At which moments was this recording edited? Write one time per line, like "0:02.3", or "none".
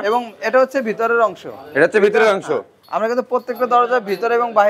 none